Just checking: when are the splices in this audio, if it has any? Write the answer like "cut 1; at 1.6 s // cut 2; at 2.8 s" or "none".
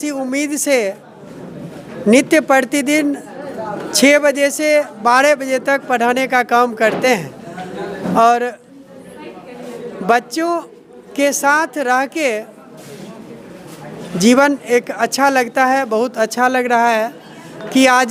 none